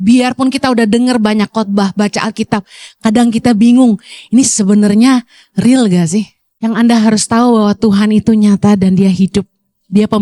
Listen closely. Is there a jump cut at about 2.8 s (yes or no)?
no